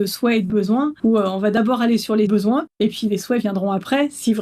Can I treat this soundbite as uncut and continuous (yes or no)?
no